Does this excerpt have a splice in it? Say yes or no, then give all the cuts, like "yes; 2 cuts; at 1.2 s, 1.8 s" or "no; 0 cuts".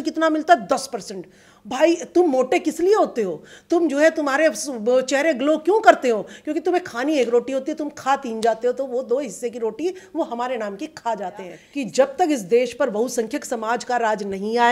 yes; 1 cut; at 11.6 s